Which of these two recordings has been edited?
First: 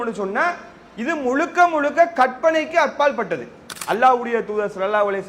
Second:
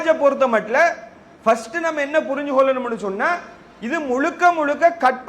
first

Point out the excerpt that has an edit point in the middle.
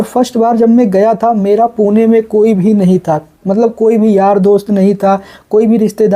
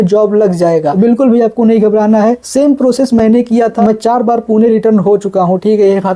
second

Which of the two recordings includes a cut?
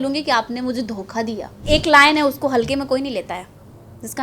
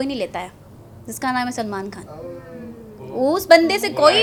first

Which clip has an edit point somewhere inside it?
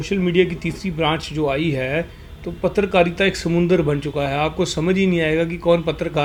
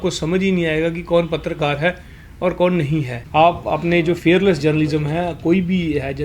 second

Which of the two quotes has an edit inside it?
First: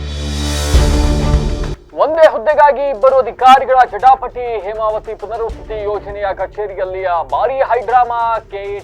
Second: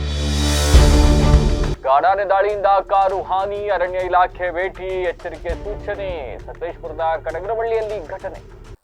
first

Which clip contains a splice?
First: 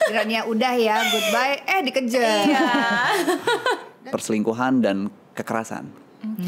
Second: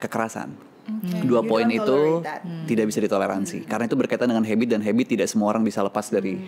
first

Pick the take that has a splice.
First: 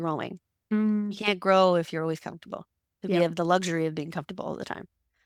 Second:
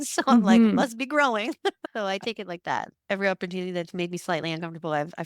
second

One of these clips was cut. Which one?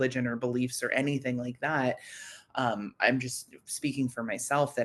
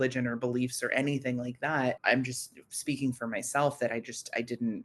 second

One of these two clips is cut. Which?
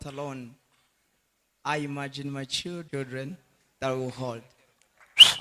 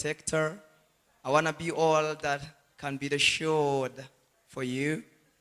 first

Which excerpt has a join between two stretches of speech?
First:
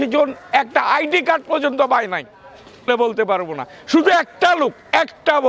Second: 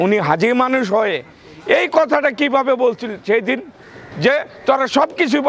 first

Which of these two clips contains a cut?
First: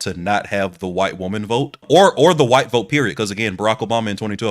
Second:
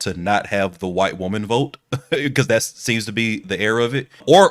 first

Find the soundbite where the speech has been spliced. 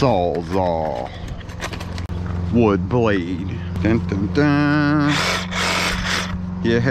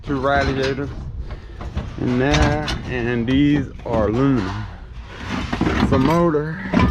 first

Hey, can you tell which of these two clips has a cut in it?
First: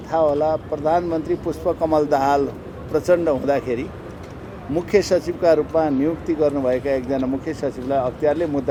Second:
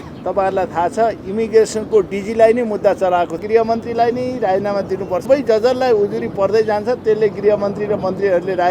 second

